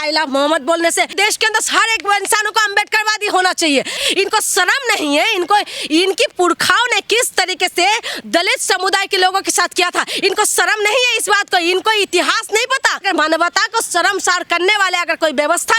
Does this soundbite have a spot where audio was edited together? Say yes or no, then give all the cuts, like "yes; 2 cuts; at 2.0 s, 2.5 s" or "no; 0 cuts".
yes; 3 cuts; at 1.1 s, 4.0 s, 13.0 s